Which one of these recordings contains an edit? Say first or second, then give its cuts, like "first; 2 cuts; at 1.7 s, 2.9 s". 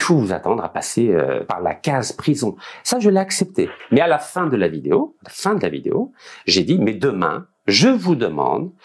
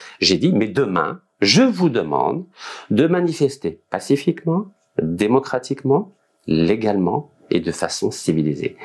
first; 1 cut; at 3.8 s